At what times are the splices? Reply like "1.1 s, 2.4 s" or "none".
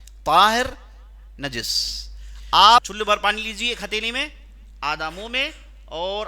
2.9 s

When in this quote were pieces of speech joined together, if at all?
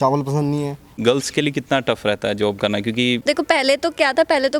1.0 s, 3.2 s

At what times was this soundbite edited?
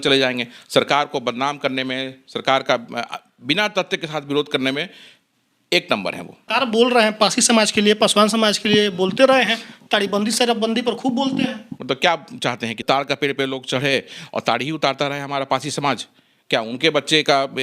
6.4 s, 11.7 s, 12.8 s

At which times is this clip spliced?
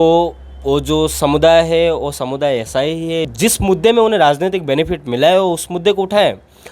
3.3 s

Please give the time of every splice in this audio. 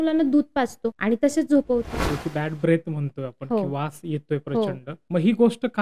1.0 s, 2.1 s, 4.9 s

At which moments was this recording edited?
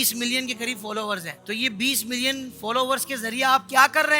1.3 s

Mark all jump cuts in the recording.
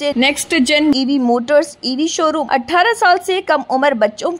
2.4 s

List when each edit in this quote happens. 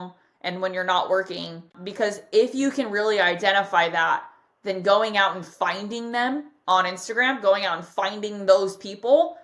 1.7 s

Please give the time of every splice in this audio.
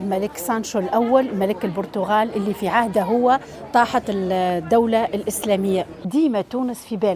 6.1 s

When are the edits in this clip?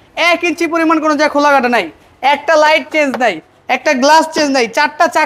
none

